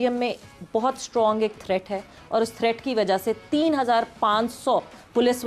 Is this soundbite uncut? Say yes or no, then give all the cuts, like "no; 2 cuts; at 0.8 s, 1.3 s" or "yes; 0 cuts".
yes; 0 cuts